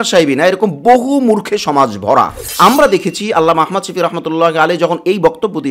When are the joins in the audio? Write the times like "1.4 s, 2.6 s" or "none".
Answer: 2.6 s